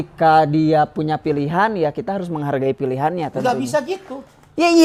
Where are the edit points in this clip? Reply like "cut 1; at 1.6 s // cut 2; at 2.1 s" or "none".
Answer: none